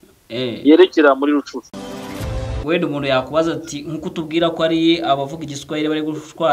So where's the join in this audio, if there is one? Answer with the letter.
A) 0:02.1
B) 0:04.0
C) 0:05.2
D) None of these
A